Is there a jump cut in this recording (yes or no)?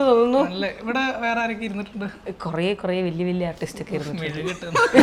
no